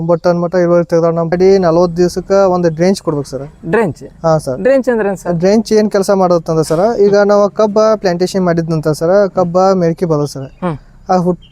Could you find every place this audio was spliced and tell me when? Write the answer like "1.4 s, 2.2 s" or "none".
1.3 s